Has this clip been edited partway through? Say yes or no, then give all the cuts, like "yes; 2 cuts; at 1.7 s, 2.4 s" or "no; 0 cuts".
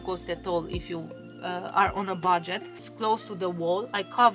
yes; 1 cut; at 2.9 s